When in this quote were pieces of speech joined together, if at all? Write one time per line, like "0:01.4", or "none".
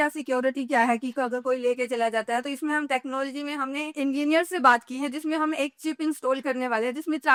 none